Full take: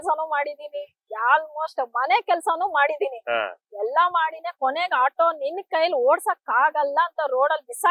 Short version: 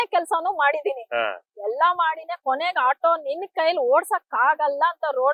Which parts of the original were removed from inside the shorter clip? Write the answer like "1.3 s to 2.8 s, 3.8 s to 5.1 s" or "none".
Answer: none

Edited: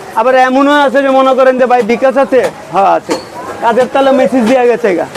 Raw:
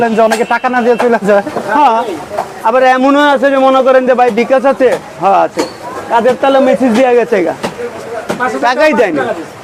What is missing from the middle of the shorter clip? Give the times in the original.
none

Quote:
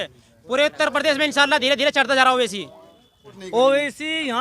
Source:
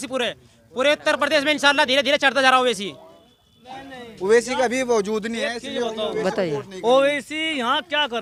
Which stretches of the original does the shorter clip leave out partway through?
3.6 s to 6.7 s

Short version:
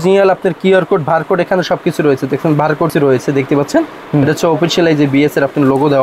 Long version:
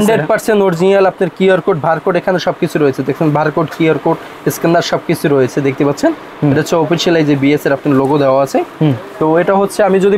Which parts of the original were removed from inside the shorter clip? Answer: 3.7 s to 5.2 s

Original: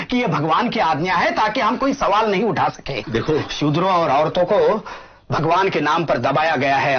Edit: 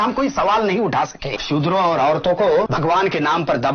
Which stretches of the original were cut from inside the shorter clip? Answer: 3.0 s to 3.5 s, 4.8 s to 5.3 s

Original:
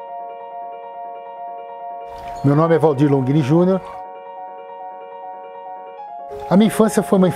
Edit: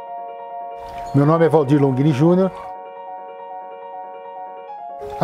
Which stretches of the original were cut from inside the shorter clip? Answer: 1.5 s to 2.4 s

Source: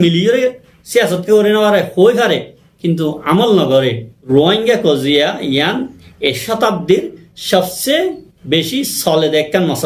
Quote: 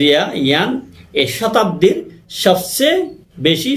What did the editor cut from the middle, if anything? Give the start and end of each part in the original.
none

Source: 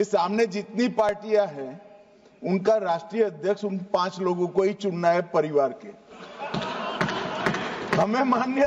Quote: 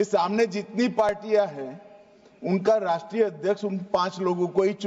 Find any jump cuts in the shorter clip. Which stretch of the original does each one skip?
none

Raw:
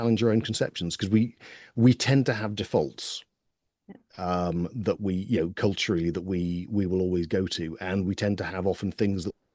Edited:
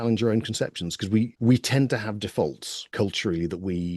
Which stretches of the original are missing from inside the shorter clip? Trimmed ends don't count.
1.3 s to 1.7 s, 3.3 s to 5.5 s

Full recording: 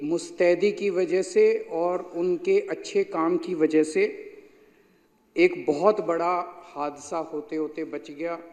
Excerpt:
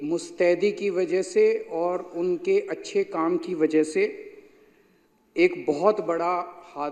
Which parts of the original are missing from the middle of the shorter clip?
none

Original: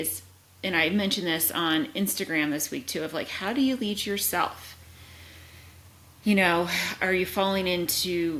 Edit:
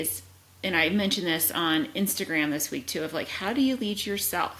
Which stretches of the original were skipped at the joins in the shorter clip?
none

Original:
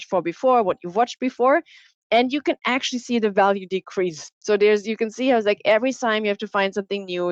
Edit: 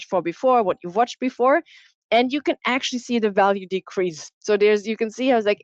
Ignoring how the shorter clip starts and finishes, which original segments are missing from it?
none

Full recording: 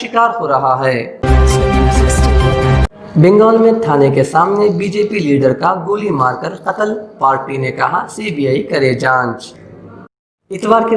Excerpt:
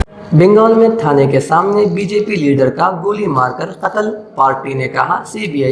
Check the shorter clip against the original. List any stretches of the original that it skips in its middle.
none

